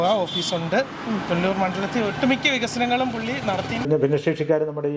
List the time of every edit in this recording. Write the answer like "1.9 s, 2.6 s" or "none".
3.9 s